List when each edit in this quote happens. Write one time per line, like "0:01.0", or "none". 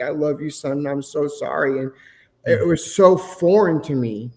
none